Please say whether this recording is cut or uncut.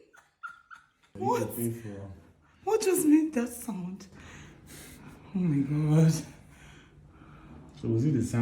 cut